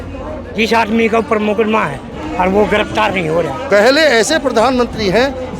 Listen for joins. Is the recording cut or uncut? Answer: cut